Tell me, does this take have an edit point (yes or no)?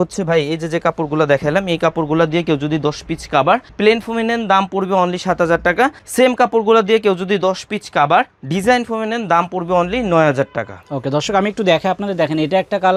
no